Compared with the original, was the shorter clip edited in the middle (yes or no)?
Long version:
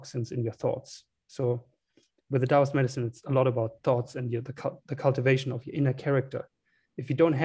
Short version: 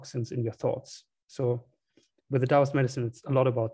no